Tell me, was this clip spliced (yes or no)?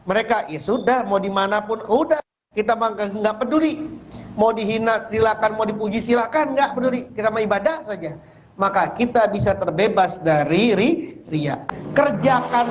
yes